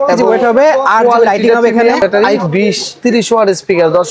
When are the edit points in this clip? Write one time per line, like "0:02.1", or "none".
0:02.0

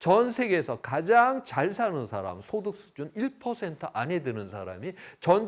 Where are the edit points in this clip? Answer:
none

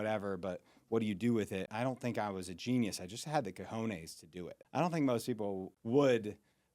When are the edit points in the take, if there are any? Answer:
0:01.7
0:04.6
0:05.7

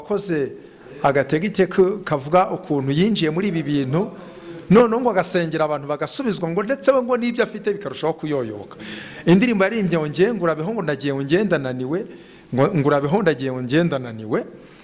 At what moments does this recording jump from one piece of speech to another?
none

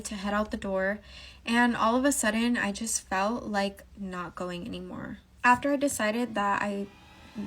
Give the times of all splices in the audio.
0:05.2

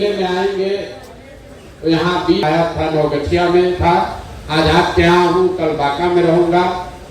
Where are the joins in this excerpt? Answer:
0:02.4

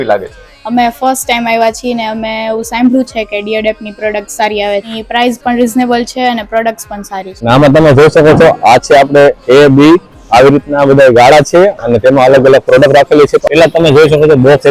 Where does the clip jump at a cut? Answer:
0:04.9
0:07.5
0:13.4

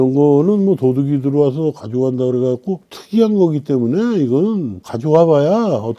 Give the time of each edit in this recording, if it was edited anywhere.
none

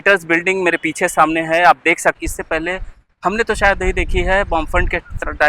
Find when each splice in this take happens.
0:02.2

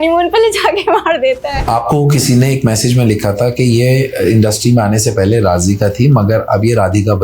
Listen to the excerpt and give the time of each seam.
0:01.7

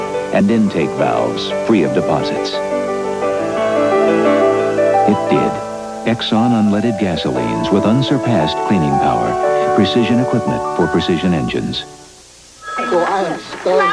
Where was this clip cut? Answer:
0:12.3

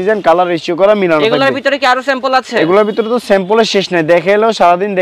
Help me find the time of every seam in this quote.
none

